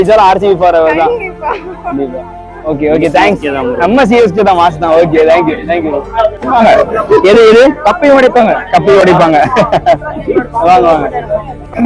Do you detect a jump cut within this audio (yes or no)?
no